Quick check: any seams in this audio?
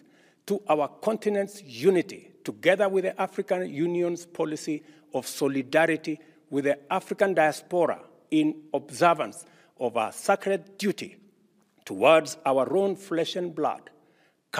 no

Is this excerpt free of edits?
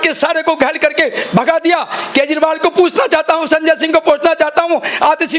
yes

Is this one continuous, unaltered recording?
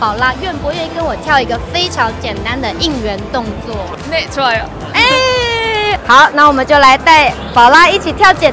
yes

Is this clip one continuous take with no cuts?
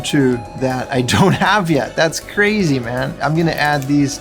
yes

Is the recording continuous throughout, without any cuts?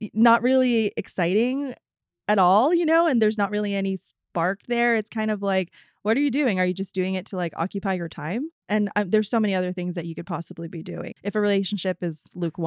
yes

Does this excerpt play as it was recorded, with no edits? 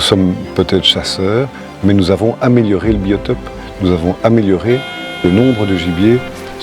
yes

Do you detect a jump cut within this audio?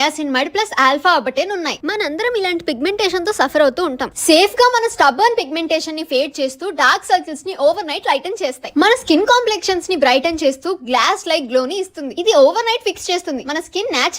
yes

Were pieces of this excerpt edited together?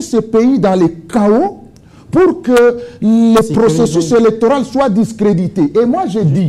no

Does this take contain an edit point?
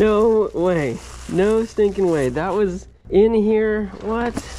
no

